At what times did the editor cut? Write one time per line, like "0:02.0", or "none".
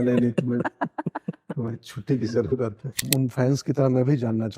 0:03.1